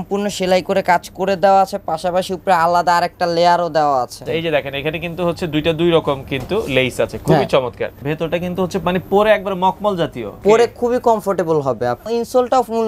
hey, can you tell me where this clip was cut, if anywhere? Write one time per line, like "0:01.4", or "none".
0:04.3
0:08.0
0:10.4
0:12.1

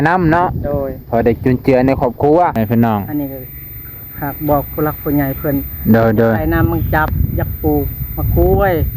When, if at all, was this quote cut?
0:02.5

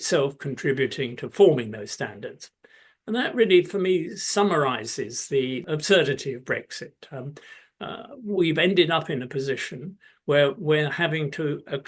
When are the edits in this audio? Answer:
0:05.6

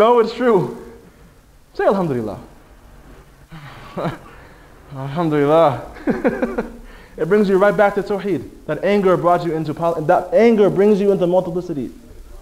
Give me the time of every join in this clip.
0:05.1

